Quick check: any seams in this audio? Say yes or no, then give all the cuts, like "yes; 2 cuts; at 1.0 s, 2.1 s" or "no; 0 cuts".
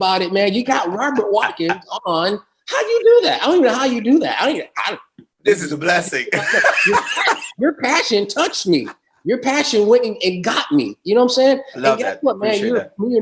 no; 0 cuts